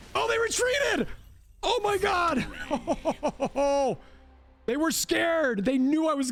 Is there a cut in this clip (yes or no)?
no